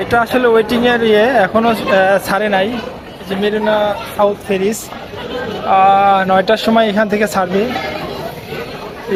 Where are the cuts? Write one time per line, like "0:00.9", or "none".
none